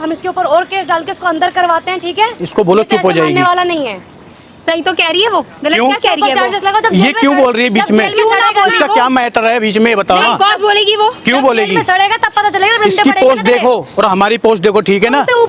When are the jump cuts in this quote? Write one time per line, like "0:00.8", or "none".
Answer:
none

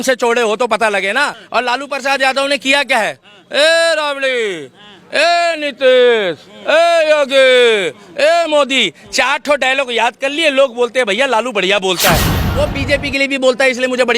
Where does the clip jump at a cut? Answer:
0:01.4
0:12.3

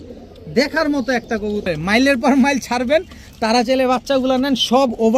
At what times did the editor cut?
0:01.6

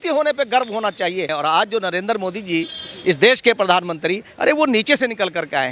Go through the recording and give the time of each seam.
0:01.3

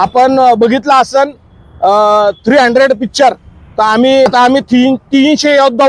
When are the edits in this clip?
0:04.3

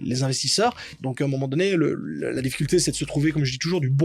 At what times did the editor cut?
0:01.0

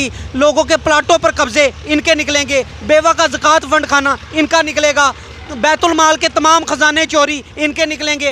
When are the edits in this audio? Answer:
none

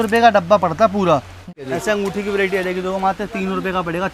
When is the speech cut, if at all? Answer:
0:01.5

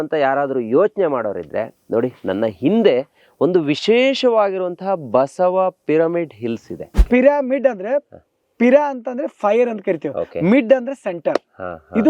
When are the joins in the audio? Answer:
0:06.9

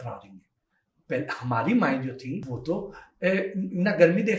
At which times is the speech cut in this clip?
0:02.5

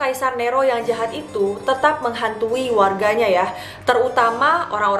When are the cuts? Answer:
none

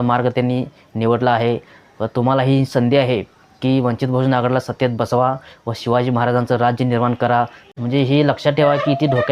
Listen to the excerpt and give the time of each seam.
0:07.6

